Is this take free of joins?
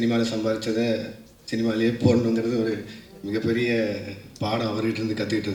yes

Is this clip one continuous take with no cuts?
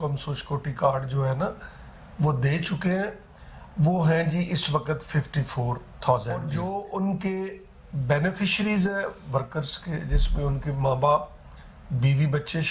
no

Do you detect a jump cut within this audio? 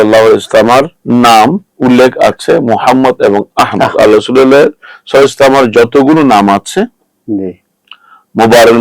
yes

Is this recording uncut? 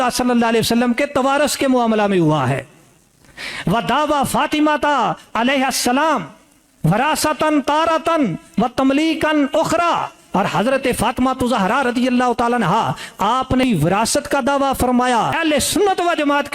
no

